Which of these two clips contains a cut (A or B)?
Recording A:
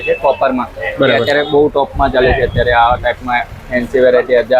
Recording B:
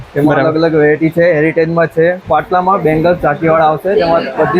B